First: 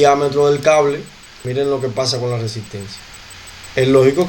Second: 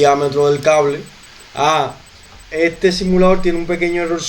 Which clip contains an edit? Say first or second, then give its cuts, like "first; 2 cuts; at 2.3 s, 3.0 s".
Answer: first; 1 cut; at 1.4 s